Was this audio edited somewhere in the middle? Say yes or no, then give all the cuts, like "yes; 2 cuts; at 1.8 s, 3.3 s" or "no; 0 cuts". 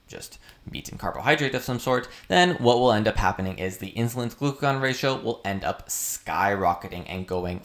no; 0 cuts